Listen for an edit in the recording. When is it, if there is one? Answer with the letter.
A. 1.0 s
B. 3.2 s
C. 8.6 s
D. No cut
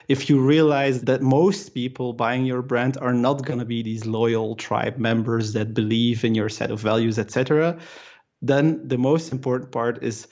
A